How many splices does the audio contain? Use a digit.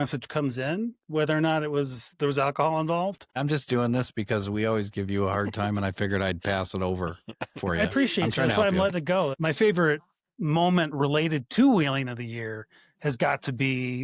2